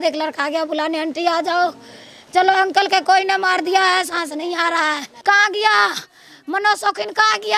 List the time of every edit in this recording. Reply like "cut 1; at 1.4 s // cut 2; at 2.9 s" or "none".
cut 1; at 5.1 s